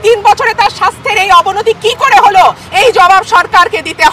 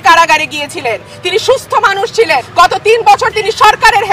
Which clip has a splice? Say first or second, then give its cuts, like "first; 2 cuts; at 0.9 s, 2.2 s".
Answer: second; 1 cut; at 2.5 s